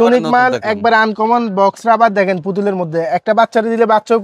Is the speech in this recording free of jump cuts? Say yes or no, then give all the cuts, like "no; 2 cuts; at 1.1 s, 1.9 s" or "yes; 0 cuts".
yes; 0 cuts